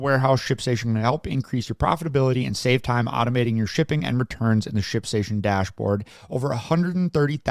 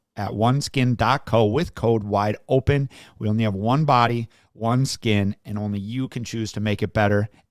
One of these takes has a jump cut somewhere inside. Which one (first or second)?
first